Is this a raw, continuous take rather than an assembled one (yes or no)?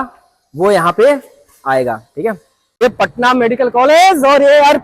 yes